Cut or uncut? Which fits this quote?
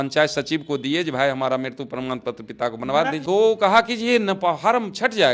cut